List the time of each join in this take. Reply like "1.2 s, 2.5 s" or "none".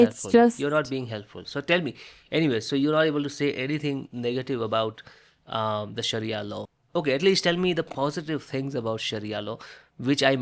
6.7 s